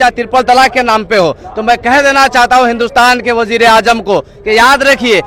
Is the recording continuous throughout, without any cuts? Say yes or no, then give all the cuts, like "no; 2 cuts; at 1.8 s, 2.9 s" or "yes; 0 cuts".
yes; 0 cuts